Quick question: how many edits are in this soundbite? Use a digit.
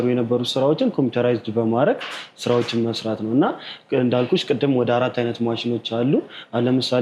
0